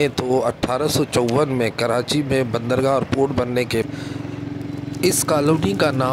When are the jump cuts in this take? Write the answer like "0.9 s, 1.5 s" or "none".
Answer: 3.8 s